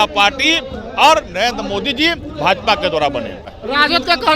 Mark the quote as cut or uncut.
cut